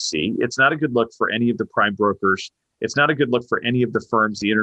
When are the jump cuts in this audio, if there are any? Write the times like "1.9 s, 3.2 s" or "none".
none